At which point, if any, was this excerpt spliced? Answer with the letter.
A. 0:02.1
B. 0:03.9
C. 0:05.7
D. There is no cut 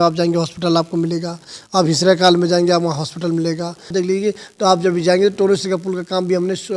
B